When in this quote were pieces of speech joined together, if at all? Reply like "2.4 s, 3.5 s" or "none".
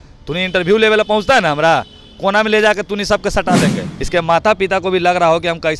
3.9 s